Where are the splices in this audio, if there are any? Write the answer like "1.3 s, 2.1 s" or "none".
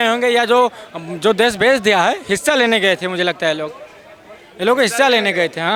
none